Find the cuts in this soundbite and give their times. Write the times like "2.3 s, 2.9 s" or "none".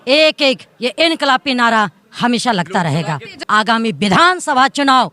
3.3 s